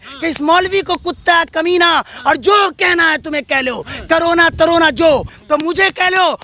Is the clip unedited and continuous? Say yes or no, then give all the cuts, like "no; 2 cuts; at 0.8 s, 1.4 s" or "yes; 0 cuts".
no; 1 cut; at 5.3 s